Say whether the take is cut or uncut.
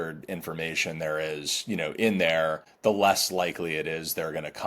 cut